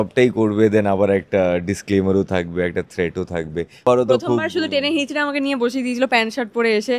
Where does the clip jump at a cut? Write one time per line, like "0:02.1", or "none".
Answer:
0:03.8